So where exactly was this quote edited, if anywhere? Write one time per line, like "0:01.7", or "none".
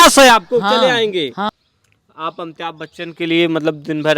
0:01.5